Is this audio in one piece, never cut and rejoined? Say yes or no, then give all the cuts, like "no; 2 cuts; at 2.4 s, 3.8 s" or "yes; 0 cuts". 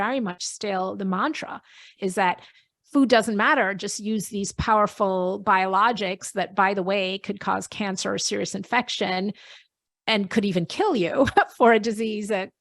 no; 1 cut; at 1.9 s